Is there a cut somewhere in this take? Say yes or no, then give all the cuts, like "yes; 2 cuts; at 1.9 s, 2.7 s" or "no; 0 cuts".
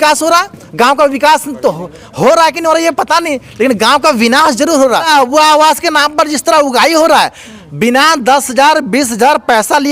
yes; 1 cut; at 5.1 s